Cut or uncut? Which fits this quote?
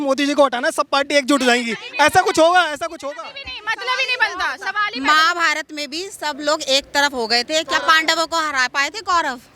uncut